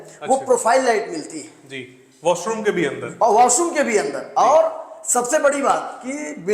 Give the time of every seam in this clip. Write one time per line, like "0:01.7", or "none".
none